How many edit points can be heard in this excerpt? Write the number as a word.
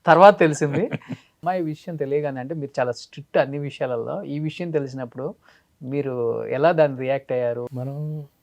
two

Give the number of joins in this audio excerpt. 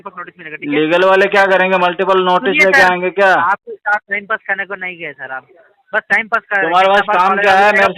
zero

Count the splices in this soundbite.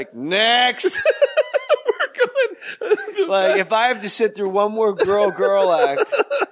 zero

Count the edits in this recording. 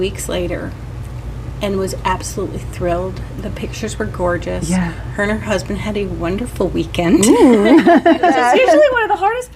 one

